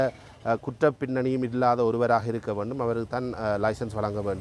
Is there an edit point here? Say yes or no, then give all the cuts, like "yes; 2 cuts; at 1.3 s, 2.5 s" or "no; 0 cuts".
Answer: no; 0 cuts